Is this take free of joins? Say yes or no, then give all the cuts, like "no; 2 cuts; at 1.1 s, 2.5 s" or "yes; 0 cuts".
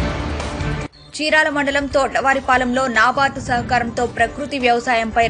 no; 1 cut; at 0.9 s